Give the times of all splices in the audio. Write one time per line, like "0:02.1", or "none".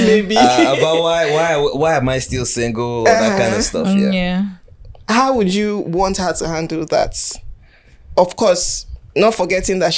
none